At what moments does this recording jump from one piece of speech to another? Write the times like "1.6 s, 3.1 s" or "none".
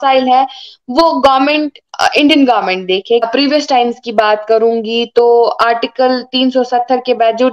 3.3 s